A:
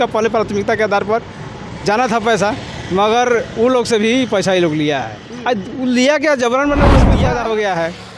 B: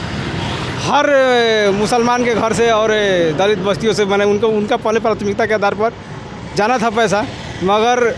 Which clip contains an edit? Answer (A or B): A